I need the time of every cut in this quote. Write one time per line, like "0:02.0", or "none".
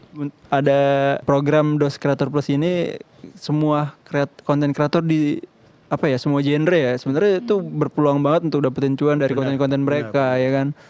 0:01.2